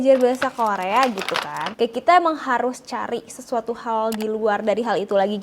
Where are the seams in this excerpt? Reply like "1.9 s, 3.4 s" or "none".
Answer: 1.7 s